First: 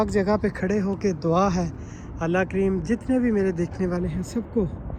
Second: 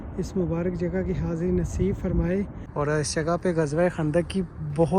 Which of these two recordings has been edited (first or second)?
second